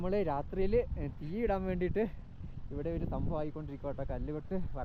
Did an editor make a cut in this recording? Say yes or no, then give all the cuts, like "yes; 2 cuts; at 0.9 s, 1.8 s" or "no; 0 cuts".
no; 0 cuts